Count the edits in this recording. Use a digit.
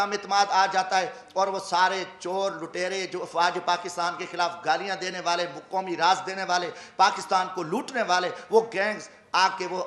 0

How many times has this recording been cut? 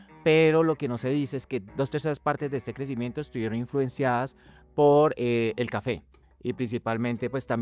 1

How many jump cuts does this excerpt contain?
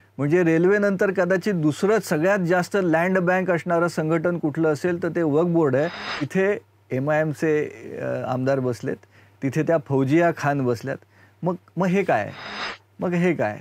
1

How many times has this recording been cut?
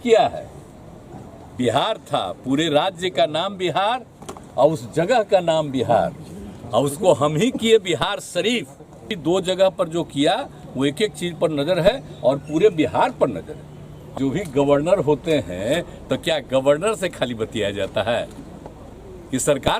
2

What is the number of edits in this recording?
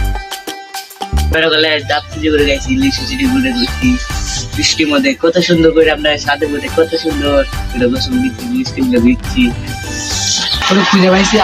2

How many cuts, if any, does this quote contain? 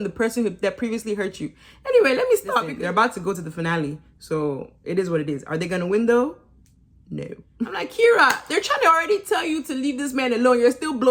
2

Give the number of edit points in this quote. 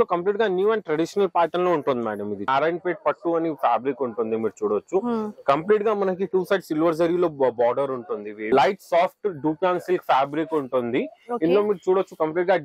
2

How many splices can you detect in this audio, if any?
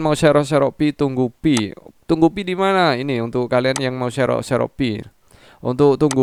0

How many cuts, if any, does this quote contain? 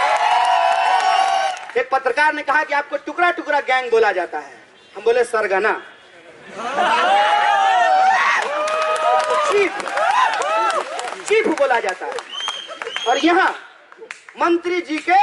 1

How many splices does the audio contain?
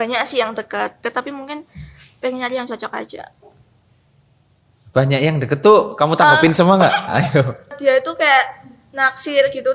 2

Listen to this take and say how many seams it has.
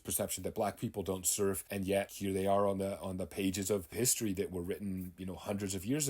2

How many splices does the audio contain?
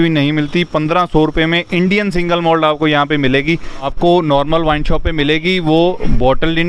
1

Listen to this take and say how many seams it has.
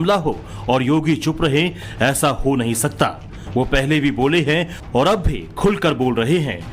0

